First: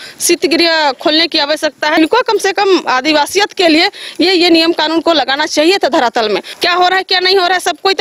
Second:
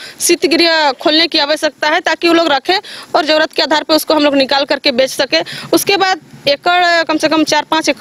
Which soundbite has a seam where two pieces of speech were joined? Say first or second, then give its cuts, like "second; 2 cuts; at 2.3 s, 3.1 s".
first; 2 cuts; at 2.0 s, 6.5 s